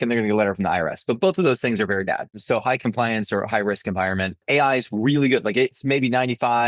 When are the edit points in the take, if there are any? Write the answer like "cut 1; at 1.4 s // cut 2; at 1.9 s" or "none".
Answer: cut 1; at 2.4 s // cut 2; at 4.4 s // cut 3; at 5.7 s